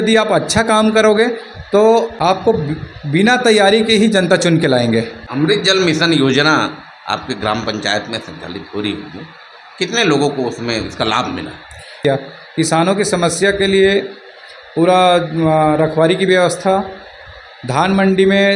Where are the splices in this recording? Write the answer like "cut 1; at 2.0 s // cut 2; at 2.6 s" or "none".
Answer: cut 1; at 2.1 s // cut 2; at 5.2 s // cut 3; at 12.0 s